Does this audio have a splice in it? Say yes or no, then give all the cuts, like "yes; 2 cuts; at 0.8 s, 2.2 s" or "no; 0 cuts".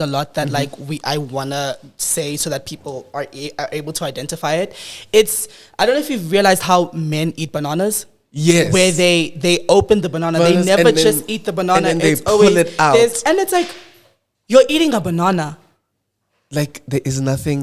no; 0 cuts